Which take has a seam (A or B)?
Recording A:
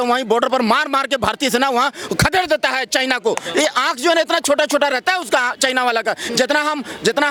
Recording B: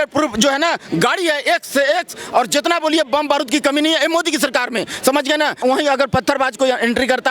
B